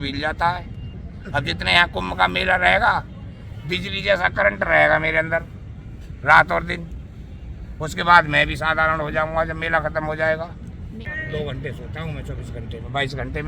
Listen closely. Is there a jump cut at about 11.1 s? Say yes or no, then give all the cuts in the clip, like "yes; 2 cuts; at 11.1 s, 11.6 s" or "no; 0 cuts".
yes; 1 cut; at 11.1 s